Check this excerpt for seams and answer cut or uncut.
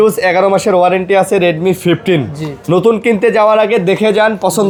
uncut